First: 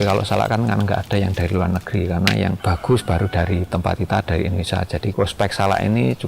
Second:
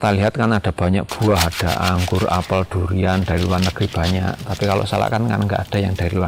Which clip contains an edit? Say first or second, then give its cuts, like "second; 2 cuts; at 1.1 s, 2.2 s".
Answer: first; 2 cuts; at 2.6 s, 5.1 s